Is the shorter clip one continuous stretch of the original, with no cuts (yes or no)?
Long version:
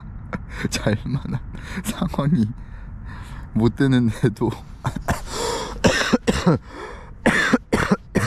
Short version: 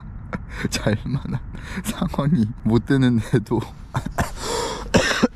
no